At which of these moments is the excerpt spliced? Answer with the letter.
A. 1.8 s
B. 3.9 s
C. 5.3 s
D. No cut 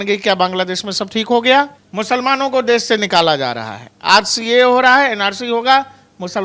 A